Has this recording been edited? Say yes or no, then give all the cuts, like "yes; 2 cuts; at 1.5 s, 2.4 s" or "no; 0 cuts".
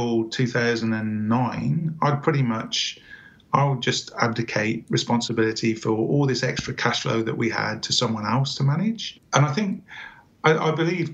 yes; 1 cut; at 9.1 s